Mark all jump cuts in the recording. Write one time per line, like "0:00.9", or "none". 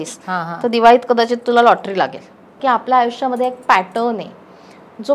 0:02.6

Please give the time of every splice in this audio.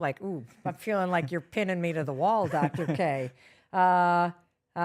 none

